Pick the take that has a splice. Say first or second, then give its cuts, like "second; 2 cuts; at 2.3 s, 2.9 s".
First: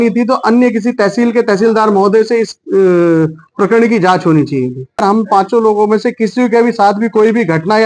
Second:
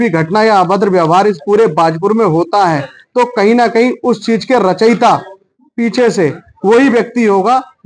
first; 1 cut; at 5.0 s